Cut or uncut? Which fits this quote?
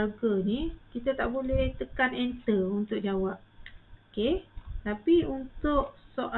uncut